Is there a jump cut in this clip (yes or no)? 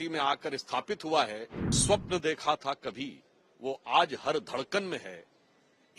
yes